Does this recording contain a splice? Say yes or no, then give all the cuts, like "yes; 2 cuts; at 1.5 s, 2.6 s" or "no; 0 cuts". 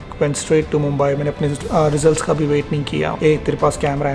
yes; 1 cut; at 3.2 s